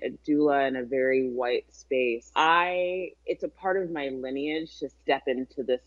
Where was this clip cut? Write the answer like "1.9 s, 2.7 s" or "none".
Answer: 2.2 s, 3.1 s